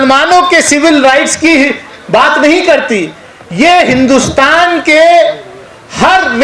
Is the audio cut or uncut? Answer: uncut